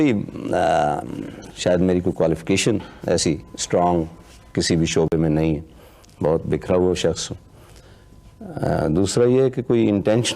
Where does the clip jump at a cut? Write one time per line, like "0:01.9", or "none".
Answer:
none